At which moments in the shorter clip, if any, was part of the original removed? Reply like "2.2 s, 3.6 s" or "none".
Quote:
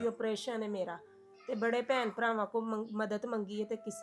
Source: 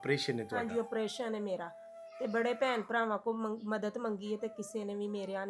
none

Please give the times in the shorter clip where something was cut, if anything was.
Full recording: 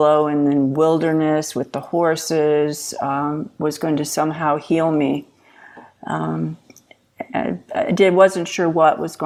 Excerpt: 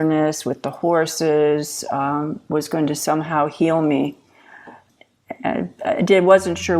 4.8 s

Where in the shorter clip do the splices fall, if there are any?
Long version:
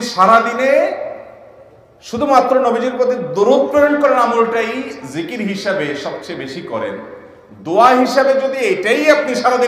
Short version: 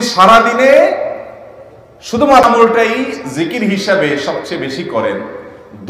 2.4 s

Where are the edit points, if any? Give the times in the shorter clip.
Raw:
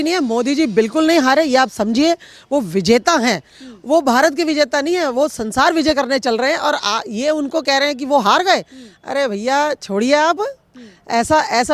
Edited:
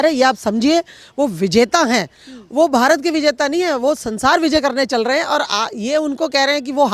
none

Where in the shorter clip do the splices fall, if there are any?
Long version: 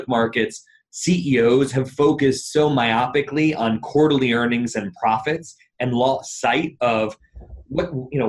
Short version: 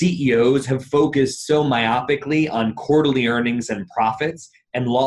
none

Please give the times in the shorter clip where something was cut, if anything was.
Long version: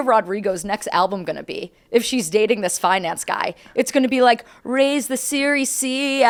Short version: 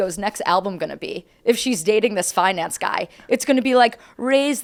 none

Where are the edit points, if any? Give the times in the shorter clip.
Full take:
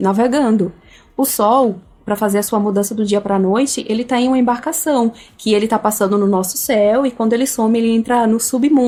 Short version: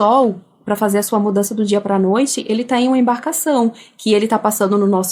none

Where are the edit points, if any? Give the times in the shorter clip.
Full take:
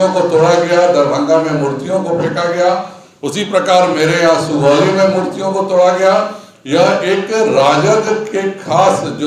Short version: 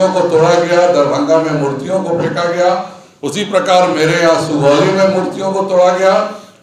none

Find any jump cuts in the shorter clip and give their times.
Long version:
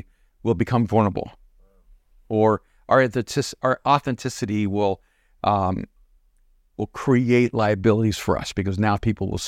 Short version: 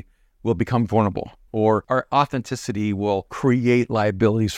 1.7 s, 3.3 s

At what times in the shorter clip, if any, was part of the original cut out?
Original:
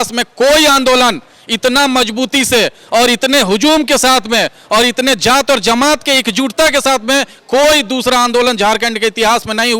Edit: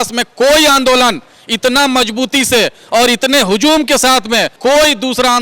4.5 s

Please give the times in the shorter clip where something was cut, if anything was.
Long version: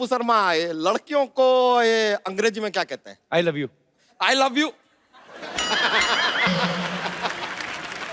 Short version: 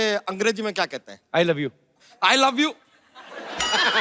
none

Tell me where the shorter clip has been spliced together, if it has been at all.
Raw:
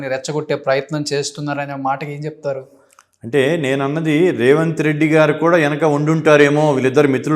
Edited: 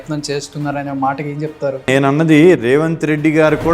1.9 s

